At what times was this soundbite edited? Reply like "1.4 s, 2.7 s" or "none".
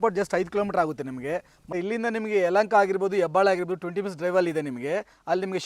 1.6 s